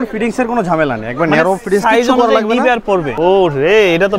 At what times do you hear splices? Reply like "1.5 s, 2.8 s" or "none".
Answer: 3.1 s